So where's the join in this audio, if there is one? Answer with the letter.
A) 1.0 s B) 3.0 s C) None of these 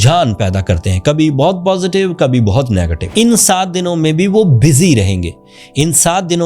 B